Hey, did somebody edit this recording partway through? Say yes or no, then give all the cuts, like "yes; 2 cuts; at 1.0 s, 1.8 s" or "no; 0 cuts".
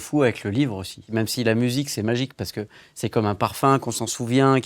yes; 1 cut; at 1.0 s